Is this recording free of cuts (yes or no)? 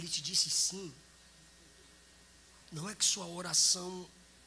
yes